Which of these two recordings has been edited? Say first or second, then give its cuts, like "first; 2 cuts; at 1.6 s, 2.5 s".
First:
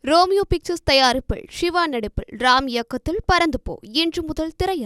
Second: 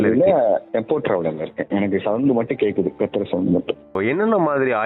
second; 1 cut; at 4.0 s